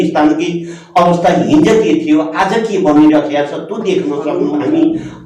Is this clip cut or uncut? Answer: cut